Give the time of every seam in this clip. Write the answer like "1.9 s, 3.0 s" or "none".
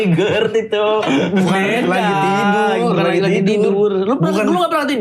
none